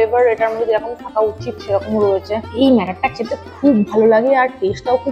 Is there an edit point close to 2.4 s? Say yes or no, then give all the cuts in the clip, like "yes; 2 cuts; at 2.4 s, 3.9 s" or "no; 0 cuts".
yes; 1 cut; at 2.4 s